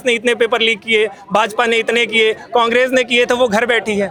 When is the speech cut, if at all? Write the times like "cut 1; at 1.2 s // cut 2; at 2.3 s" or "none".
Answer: none